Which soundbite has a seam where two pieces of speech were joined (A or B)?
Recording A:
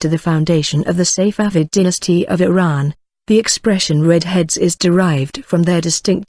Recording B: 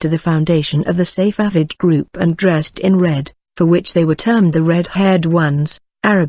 A